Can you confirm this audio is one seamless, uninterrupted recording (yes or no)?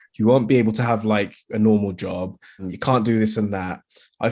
no